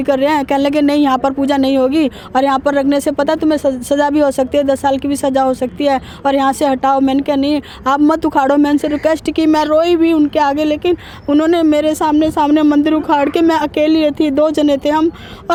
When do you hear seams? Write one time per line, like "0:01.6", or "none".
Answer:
none